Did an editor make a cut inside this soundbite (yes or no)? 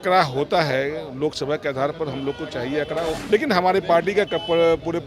yes